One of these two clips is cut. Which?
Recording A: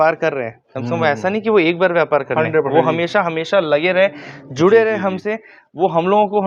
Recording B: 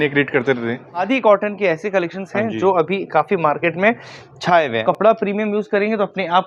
B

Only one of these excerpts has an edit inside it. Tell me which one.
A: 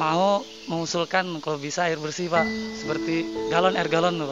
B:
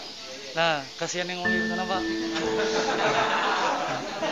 A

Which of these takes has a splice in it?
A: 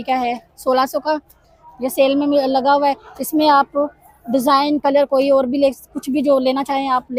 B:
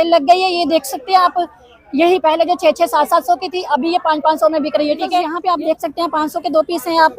B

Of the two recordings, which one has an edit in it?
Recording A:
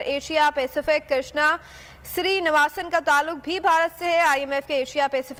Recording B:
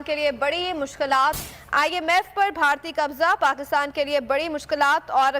B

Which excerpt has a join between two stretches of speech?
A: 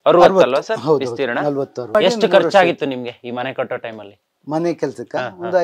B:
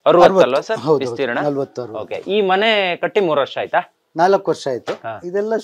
A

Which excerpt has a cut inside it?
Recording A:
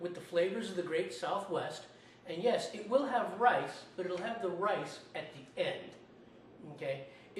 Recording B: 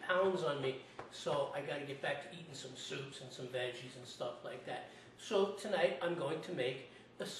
A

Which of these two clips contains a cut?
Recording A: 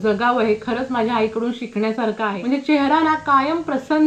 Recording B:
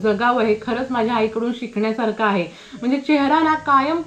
A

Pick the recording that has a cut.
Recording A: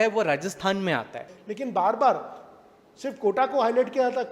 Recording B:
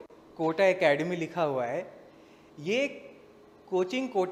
A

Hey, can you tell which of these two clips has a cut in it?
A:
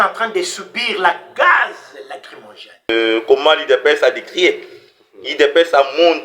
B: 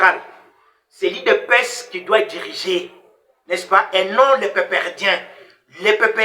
A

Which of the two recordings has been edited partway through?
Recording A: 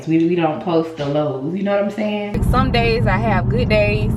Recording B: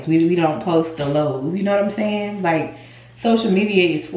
A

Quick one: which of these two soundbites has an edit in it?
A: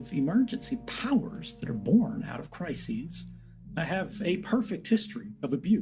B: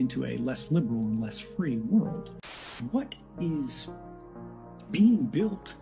B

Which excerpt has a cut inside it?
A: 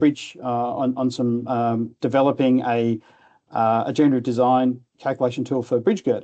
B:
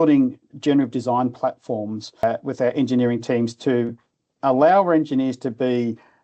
B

